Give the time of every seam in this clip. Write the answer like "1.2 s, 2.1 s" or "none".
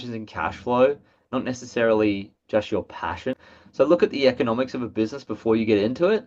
3.4 s

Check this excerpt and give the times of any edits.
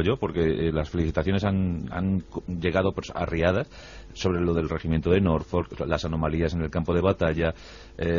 1.1 s

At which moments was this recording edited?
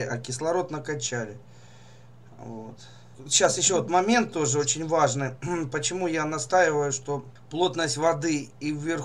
3.2 s, 7.4 s

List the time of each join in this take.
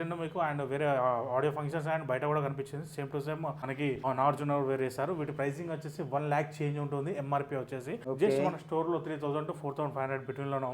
3.8 s, 8.0 s

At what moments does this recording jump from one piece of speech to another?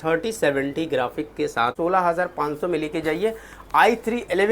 1.7 s

